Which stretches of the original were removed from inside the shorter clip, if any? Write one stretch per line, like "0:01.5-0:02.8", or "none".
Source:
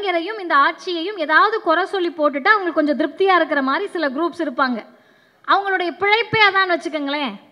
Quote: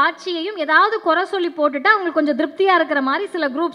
none